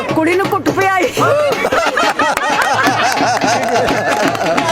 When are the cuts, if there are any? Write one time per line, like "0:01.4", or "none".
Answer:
0:01.7

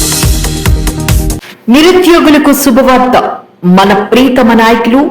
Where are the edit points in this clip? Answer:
0:01.5

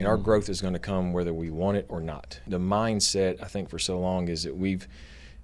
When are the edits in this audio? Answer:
0:02.4

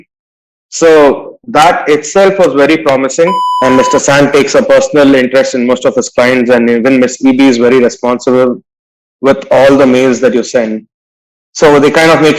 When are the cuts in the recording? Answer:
0:03.5

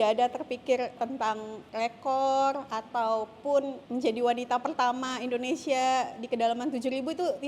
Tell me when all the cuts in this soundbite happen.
0:01.0
0:03.8

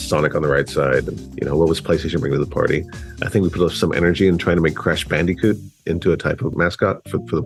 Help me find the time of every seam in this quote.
none

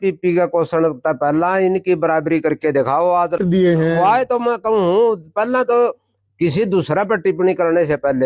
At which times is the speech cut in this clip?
0:03.4

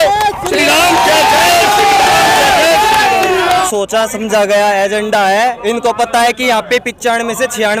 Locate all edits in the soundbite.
0:03.7

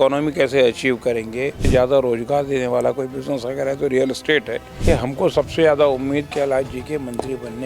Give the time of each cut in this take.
0:01.7
0:04.7

